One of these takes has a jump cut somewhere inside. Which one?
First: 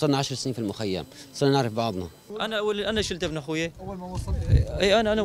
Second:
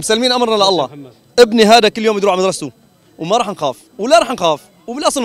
first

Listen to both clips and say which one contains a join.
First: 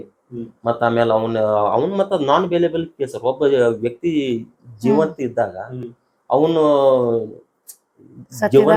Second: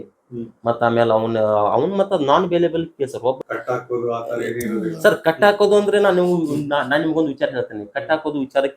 second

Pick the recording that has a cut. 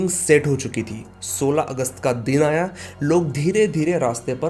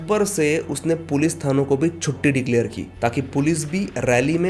second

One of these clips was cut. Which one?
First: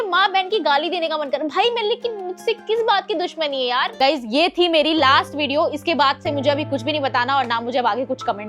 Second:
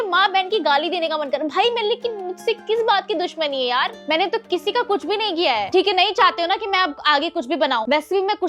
first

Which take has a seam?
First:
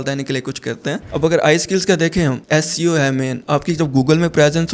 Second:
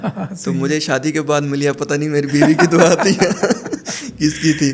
first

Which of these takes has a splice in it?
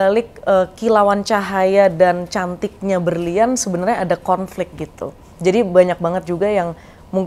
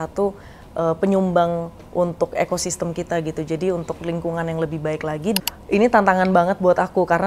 second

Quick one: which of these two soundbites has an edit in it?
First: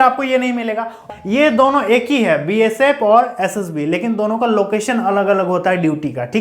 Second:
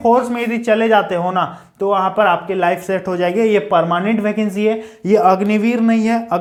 first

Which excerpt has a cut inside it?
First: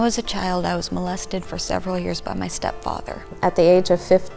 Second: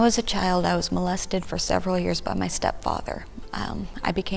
first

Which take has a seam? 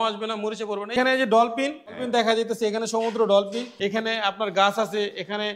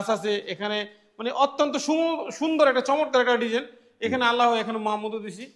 first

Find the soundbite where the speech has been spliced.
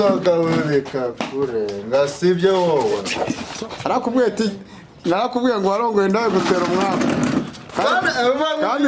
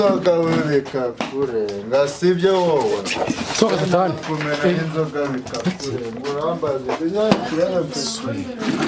first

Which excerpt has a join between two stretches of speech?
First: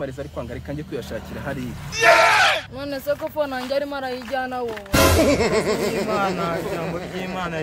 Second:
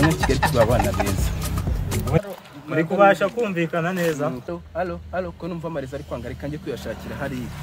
second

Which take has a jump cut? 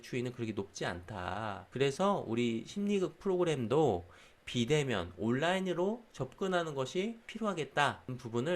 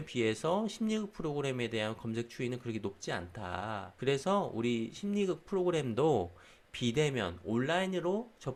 first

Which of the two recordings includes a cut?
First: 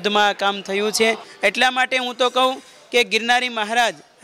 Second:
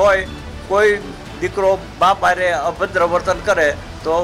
first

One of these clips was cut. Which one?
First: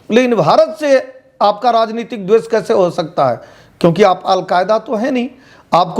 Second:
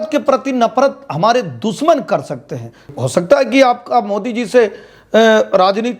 second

